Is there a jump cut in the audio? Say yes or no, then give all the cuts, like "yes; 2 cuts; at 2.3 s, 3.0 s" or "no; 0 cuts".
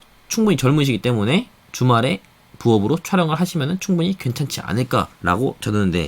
yes; 1 cut; at 5.1 s